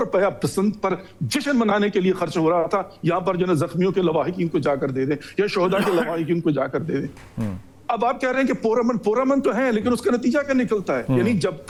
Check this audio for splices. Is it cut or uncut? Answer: uncut